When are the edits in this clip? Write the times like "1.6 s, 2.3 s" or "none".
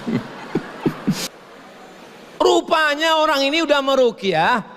1.3 s

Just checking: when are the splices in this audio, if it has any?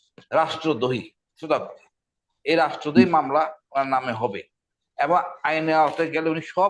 none

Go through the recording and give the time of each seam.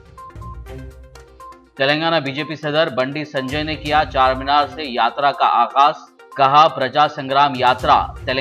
1.0 s

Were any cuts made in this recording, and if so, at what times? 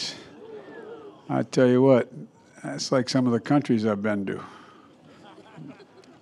none

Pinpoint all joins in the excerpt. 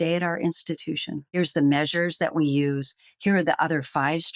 1.2 s

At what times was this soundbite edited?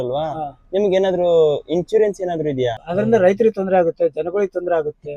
2.8 s

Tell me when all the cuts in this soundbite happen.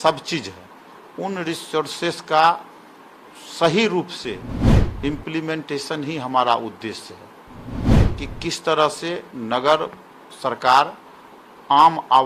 none

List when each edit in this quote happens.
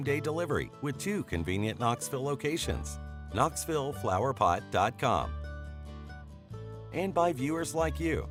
none

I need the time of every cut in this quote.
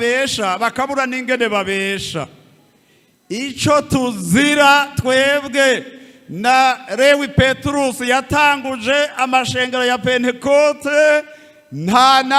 none

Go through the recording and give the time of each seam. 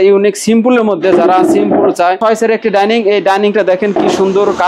2.2 s

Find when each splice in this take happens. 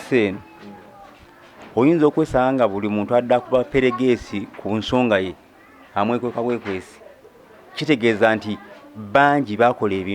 none

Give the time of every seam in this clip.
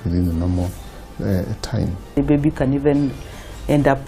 2.1 s

